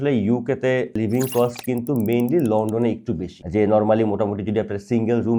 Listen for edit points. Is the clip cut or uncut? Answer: cut